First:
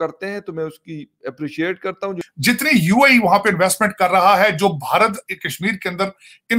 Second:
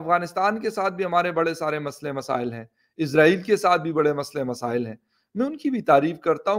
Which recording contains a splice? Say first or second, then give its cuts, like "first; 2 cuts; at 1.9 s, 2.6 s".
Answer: first; 1 cut; at 2.2 s